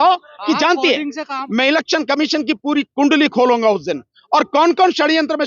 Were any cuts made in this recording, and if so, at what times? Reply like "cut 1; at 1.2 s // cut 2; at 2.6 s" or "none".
cut 1; at 1.4 s